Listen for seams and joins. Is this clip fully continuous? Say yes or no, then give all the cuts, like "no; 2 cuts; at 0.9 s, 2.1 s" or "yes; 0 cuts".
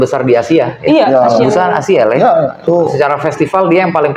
no; 1 cut; at 2.6 s